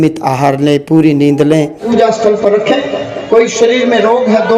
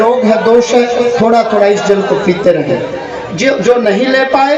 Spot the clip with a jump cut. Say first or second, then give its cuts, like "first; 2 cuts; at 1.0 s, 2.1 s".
first; 1 cut; at 1.9 s